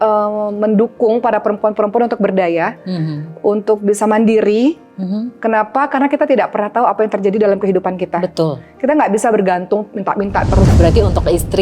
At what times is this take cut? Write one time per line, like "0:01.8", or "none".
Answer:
0:10.7